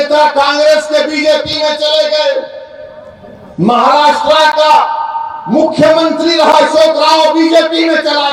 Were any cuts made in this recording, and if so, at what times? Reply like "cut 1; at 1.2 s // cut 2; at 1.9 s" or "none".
none